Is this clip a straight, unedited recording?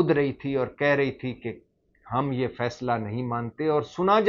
yes; 0 cuts

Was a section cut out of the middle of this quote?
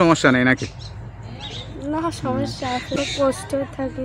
yes; 1 cut; at 3.0 s

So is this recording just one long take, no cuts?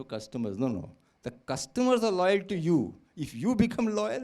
yes; 0 cuts

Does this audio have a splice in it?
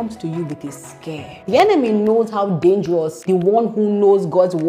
yes; 2 cuts; at 1.3 s, 3.2 s

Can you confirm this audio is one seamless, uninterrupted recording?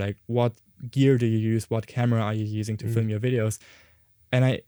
yes; 0 cuts

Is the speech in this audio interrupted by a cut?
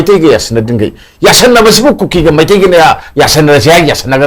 no; 0 cuts

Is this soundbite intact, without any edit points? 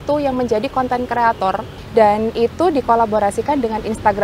no; 1 cut; at 1.7 s

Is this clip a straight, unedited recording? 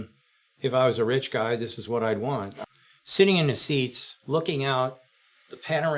no; 1 cut; at 2.5 s

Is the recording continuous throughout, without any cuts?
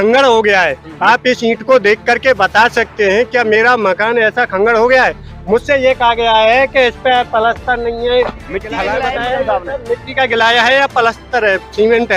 no; 1 cut; at 8.9 s

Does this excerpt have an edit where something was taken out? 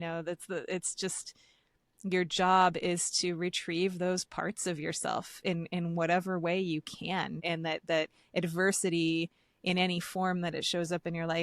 yes; 1 cut; at 7.4 s

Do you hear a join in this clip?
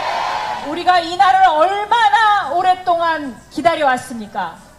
yes; 1 cut; at 3.2 s

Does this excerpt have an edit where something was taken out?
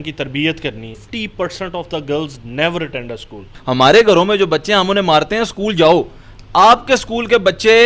yes; 2 cuts; at 1.1 s, 3.5 s

